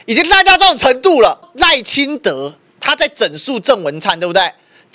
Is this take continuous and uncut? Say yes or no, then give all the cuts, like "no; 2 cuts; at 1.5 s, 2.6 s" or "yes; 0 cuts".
no; 1 cut; at 1.5 s